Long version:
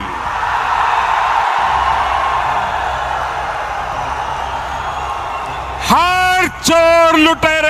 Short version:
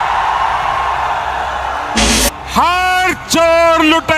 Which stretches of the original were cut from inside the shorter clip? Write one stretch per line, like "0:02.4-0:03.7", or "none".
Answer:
0:03.6-0:05.4